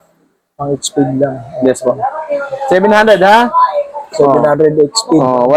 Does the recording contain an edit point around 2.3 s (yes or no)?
no